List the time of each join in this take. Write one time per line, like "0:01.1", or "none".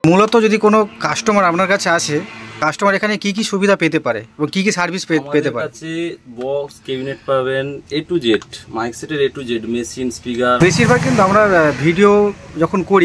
0:02.6
0:10.6